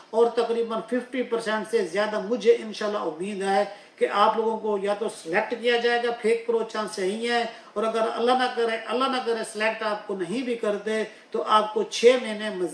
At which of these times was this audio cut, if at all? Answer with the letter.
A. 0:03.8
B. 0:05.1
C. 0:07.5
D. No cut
D